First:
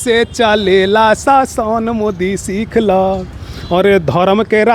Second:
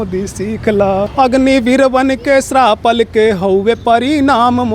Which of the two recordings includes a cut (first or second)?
second